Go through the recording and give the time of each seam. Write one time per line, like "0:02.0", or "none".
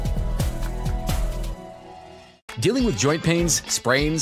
none